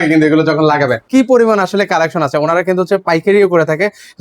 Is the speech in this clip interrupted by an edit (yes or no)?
yes